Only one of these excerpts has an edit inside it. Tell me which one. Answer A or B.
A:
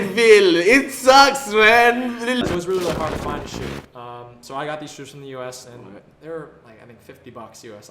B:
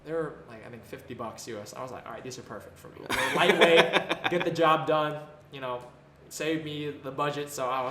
A